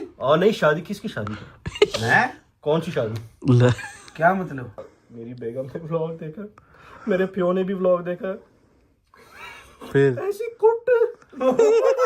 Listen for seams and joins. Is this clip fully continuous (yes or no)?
no